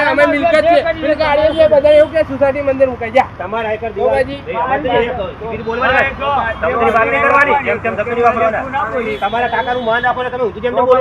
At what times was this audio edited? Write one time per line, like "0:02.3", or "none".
none

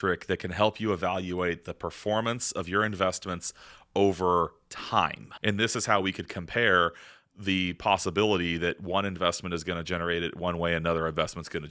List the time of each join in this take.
0:05.3

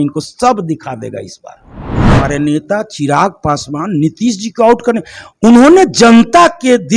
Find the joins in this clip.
0:02.0

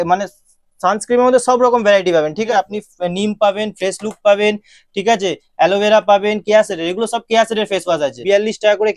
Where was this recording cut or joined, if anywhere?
0:02.5
0:08.2

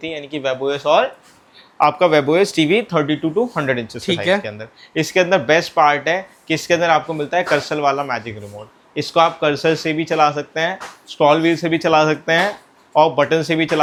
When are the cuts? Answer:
none

